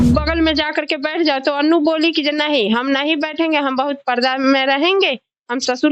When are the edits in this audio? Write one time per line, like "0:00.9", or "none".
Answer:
none